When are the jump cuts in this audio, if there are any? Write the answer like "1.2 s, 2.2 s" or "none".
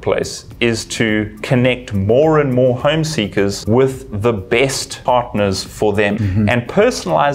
3.6 s, 4.9 s, 6.2 s